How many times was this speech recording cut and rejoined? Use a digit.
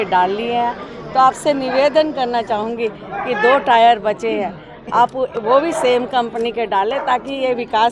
0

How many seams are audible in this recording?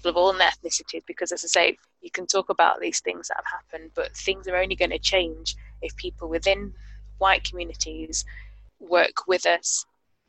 1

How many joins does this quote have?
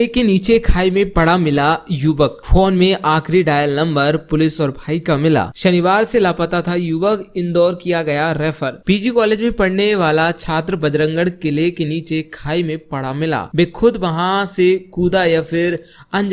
0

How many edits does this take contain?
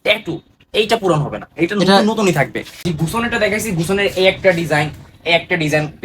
1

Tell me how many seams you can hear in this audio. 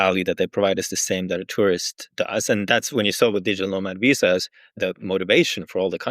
1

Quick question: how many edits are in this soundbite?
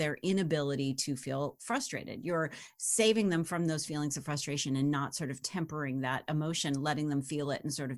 0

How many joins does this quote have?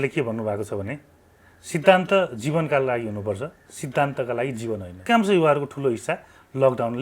1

